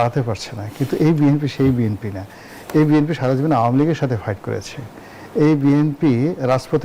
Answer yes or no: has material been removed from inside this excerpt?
no